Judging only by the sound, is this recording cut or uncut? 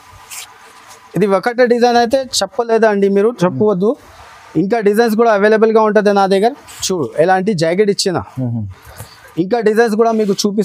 uncut